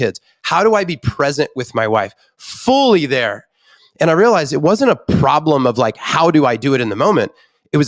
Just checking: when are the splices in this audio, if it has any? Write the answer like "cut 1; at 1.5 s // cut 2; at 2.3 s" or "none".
none